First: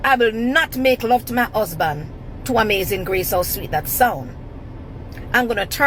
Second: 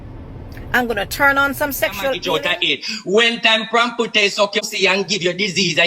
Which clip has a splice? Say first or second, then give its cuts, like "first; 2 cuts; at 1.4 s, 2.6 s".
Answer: second; 2 cuts; at 2.2 s, 4.7 s